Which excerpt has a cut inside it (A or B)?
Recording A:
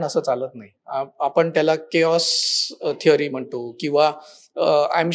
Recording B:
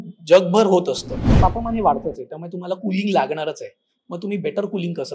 B